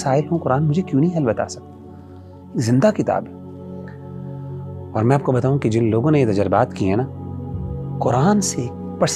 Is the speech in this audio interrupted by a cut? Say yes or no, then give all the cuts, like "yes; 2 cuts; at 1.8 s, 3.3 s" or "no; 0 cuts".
no; 0 cuts